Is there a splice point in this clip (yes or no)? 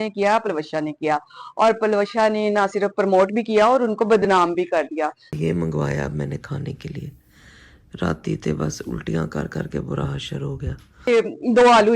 yes